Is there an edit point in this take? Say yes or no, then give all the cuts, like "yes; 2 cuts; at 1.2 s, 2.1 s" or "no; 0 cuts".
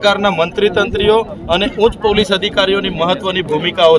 no; 0 cuts